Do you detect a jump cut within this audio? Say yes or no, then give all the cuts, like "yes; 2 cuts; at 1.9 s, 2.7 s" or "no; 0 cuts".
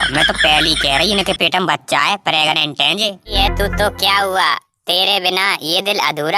yes; 1 cut; at 3.3 s